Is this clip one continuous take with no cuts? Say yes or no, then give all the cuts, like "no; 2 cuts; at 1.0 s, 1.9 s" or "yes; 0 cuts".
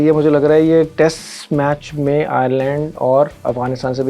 yes; 0 cuts